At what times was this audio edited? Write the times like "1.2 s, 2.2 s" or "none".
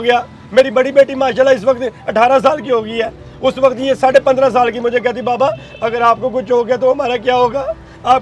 none

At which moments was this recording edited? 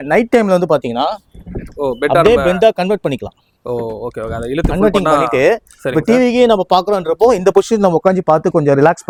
none

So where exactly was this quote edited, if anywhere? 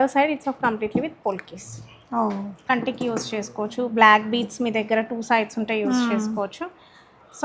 2.7 s

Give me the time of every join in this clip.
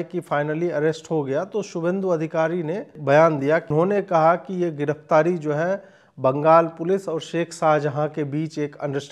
3.0 s, 3.7 s

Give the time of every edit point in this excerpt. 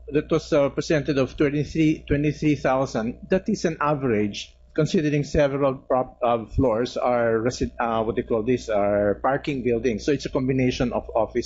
2.1 s

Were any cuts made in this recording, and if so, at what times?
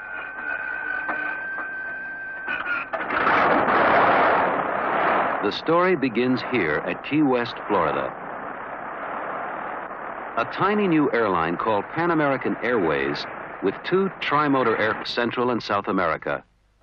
none

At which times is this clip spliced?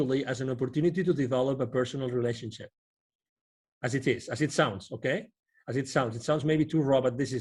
none

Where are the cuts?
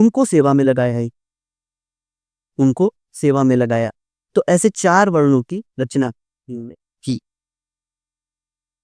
none

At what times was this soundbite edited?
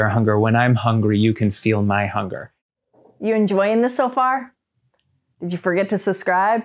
none

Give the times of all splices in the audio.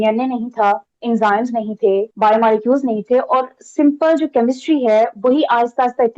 0.9 s, 2.1 s

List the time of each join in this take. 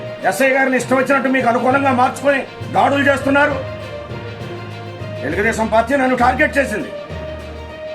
3.6 s, 5.2 s, 6.9 s

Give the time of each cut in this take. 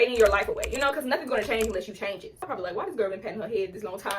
2.4 s

